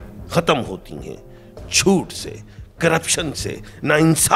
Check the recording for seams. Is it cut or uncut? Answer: uncut